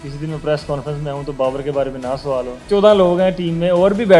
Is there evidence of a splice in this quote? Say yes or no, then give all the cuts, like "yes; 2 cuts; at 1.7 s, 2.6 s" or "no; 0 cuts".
yes; 1 cut; at 2.6 s